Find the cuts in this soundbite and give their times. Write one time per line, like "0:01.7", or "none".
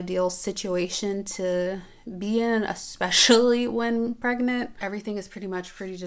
0:04.8

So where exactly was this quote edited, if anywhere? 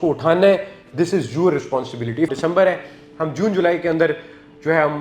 0:02.3

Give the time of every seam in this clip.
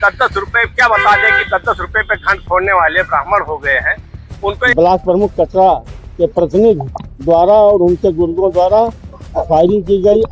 0:04.6

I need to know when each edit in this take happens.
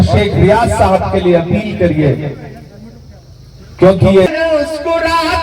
0:04.3

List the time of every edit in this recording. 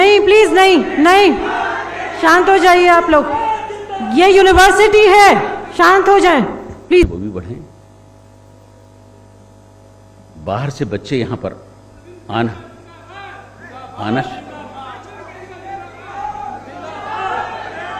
0:07.0

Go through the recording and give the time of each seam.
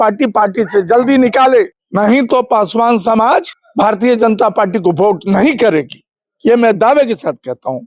0:01.8
0:03.6

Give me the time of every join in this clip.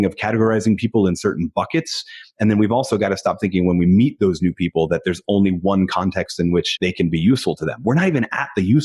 0:06.7

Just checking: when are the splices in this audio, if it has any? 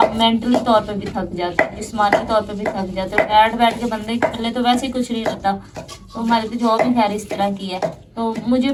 none

